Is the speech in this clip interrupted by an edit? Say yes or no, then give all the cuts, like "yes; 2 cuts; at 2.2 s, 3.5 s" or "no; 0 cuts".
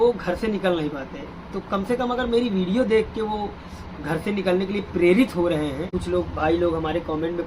yes; 1 cut; at 5.9 s